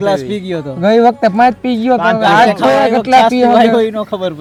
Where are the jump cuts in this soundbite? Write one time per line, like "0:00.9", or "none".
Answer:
none